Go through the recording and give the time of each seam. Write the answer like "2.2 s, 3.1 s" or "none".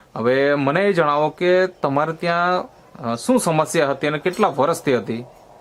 none